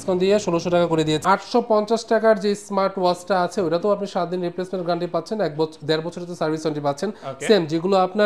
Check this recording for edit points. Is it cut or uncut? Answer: cut